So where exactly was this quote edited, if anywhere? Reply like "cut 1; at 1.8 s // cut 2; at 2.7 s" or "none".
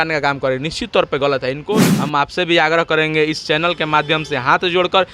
cut 1; at 1.9 s

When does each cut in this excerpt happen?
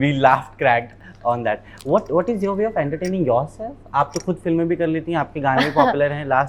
none

